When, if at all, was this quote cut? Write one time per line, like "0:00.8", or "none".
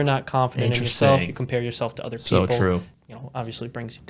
0:02.9